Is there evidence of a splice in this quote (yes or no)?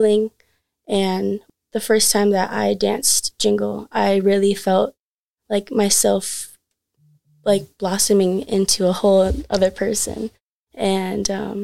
yes